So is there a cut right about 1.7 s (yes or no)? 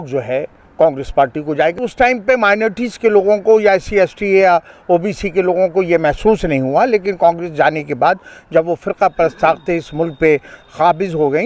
yes